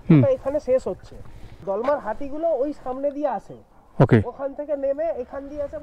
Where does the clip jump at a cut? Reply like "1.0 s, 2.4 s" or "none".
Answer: 1.4 s